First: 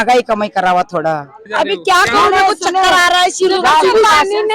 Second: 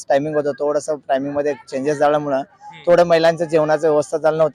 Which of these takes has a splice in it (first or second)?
first